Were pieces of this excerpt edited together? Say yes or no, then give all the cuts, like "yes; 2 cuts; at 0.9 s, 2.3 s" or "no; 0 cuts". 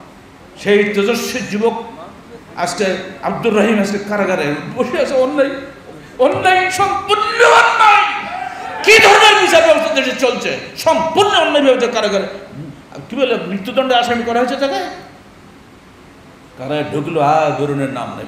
no; 0 cuts